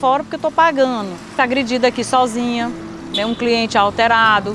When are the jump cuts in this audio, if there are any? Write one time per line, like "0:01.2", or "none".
0:01.3